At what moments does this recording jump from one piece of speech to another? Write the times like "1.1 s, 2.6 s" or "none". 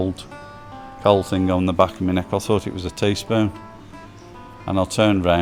none